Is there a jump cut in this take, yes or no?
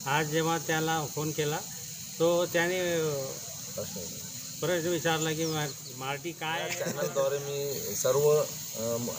yes